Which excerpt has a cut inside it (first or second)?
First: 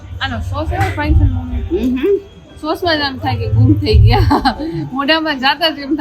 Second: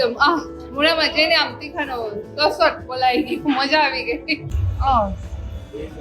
second